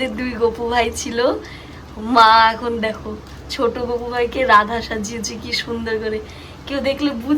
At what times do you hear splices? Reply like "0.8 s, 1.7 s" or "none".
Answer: none